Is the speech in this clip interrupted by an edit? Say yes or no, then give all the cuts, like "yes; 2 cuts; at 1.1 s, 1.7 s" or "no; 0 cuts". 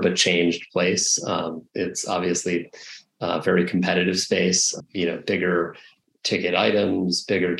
no; 0 cuts